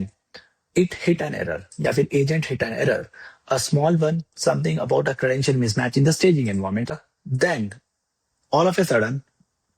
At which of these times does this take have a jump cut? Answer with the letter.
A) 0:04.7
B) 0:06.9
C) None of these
B